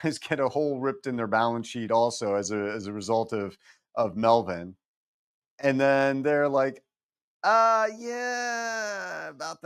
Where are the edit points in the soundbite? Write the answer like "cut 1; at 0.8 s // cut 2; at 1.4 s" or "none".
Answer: none